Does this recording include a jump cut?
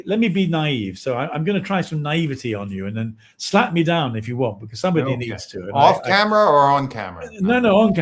no; 0 cuts

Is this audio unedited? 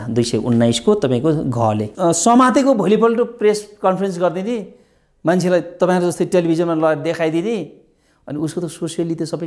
no; 1 cut; at 1.9 s

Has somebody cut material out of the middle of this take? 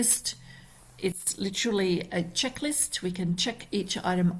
no; 0 cuts

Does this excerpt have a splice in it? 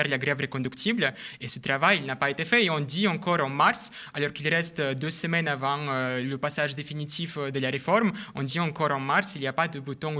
no; 0 cuts

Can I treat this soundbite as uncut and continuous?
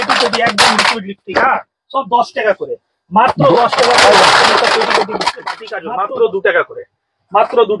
no; 1 cut; at 5.7 s

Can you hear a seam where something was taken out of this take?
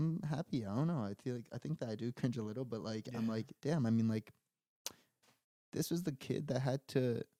no; 0 cuts

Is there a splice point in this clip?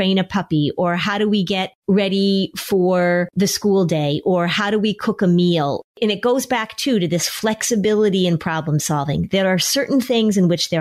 yes; 3 cuts; at 1.7 s, 3.3 s, 5.9 s

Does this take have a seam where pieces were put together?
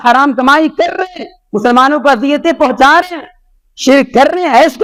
no; 0 cuts

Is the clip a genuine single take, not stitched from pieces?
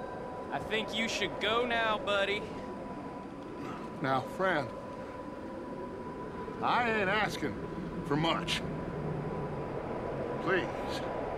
no; 1 cut; at 3.3 s

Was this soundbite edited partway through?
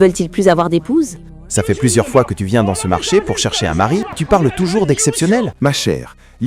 yes; 3 cuts; at 1.5 s, 4.2 s, 5.5 s

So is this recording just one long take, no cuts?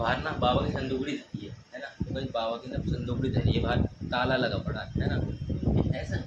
yes; 0 cuts

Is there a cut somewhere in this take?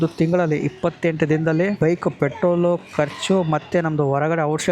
yes; 1 cut; at 1.8 s

